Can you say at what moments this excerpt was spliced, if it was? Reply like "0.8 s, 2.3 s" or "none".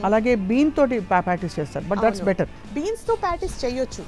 2.6 s